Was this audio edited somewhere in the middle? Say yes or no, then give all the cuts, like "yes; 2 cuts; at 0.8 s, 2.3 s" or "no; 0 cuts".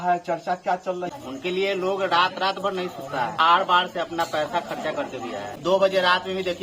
yes; 3 cuts; at 1.1 s, 3.4 s, 5.5 s